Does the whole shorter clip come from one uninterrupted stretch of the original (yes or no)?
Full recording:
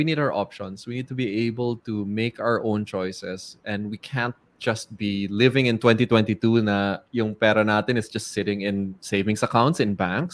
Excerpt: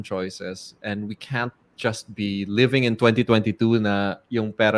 yes